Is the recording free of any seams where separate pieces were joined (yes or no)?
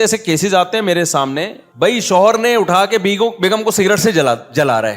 no